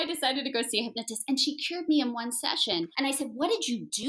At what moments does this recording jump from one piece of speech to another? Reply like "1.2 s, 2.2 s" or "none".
2.9 s